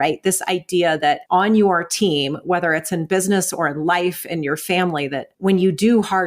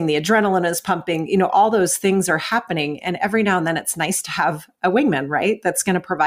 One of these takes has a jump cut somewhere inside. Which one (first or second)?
first